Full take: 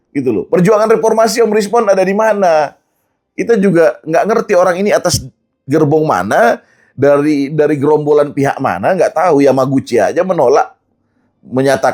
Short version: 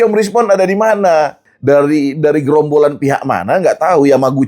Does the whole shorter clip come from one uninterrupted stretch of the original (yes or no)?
no